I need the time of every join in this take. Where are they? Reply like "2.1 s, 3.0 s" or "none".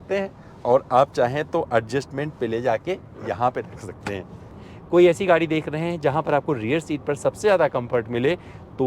4.6 s